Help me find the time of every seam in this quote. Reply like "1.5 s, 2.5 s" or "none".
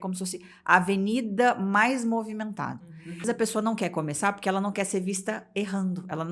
3.2 s